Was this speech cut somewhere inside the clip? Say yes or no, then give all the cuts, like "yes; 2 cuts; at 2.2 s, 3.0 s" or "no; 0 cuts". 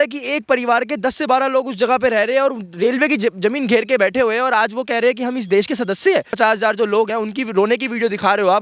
yes; 2 cuts; at 6.3 s, 7.1 s